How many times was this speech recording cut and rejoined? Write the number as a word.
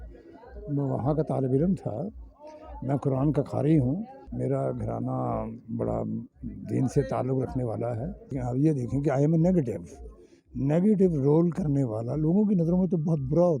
two